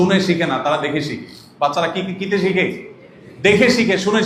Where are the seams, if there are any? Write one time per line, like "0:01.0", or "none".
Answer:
none